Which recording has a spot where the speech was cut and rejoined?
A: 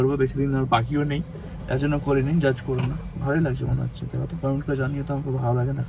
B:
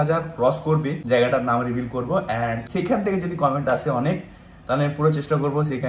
B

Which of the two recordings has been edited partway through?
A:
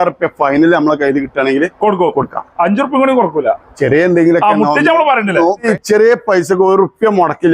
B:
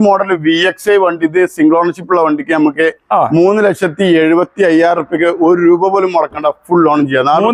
A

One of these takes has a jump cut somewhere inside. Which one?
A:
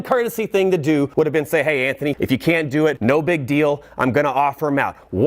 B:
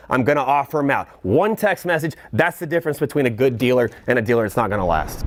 A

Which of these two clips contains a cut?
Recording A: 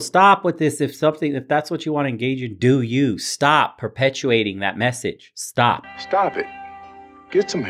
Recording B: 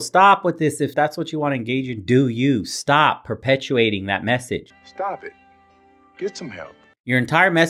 B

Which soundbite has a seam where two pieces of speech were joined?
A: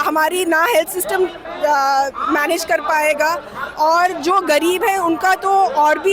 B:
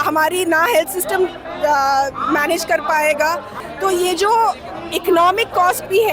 B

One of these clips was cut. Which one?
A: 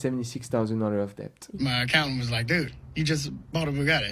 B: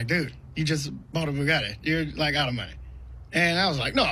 A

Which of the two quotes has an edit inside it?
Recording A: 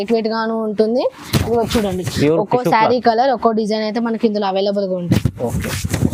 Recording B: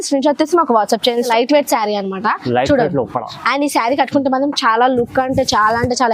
B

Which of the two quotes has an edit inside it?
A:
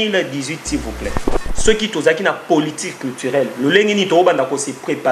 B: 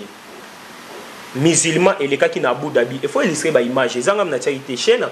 A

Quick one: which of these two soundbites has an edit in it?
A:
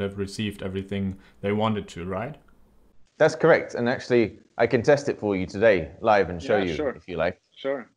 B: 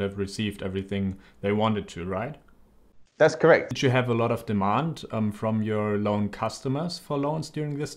B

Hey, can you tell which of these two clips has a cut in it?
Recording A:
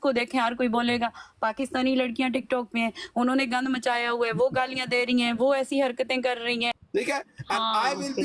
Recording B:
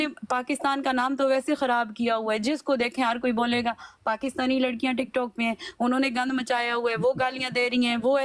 A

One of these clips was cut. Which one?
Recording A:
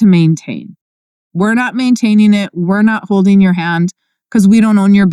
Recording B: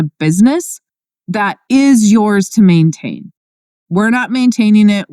B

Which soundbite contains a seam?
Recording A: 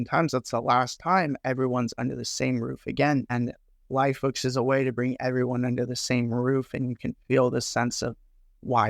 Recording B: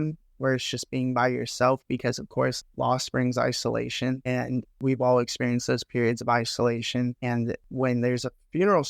B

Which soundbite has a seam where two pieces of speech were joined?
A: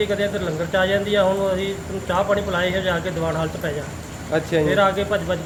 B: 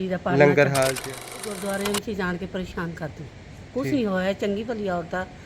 B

